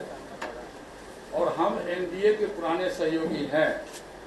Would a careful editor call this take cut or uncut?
uncut